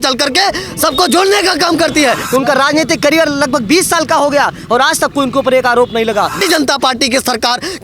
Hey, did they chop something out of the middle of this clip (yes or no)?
yes